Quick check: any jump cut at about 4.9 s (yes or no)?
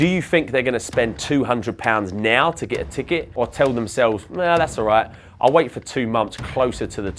no